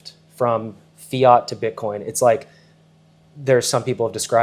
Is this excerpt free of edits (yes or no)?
yes